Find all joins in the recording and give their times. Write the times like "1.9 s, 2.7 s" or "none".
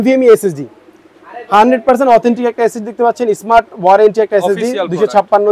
none